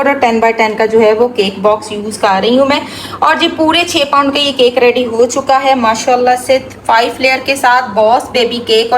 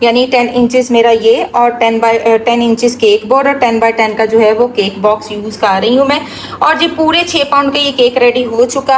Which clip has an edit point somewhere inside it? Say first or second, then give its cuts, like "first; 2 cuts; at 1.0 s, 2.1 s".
first; 1 cut; at 6.7 s